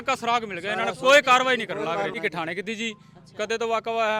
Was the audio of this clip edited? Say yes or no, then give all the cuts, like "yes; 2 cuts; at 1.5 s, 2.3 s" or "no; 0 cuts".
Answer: yes; 1 cut; at 2.2 s